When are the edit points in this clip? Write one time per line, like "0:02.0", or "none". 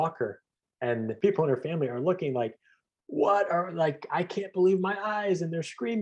0:01.1